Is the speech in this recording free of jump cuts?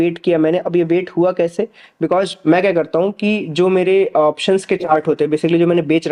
yes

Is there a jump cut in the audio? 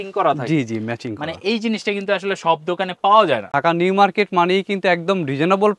yes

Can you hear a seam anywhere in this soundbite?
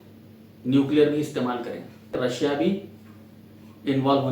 yes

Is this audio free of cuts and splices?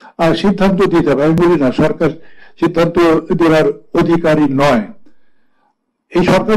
yes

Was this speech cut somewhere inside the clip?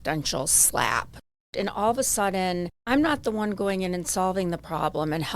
yes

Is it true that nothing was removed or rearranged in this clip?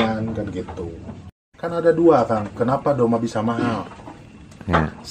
no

